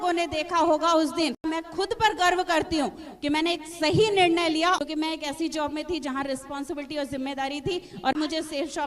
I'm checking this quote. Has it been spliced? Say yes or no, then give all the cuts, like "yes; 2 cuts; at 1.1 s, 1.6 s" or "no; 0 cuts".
yes; 3 cuts; at 1.4 s, 4.8 s, 8.1 s